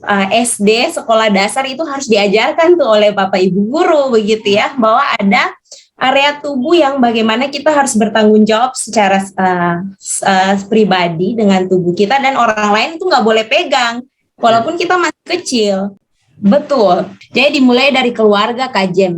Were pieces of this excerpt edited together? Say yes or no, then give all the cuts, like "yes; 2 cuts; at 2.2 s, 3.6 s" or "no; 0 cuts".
yes; 1 cut; at 16.0 s